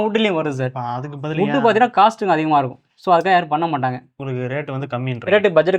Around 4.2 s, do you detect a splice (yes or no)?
yes